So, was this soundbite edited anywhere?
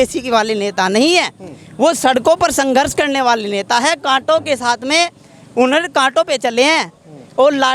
no; 0 cuts

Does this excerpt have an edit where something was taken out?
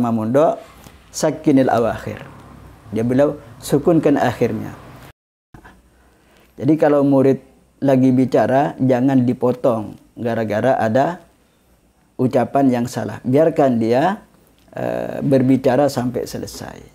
yes; 1 cut; at 5.1 s

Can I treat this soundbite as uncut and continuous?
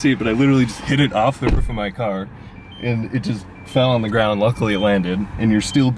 yes; 0 cuts

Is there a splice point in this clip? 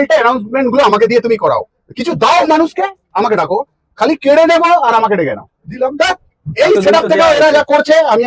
no; 0 cuts

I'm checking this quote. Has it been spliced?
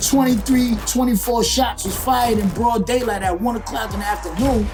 no; 0 cuts

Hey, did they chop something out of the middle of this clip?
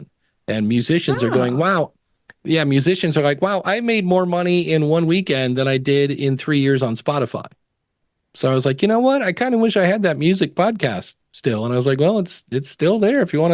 no; 0 cuts

